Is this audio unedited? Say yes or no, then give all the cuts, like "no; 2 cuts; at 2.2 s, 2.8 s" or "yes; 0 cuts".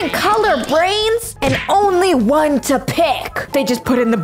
no; 2 cuts; at 1.3 s, 3.3 s